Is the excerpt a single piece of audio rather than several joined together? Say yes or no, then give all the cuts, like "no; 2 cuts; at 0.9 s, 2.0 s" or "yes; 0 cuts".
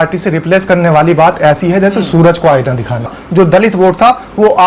no; 1 cut; at 3.2 s